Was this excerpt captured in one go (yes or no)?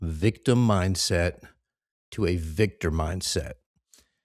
yes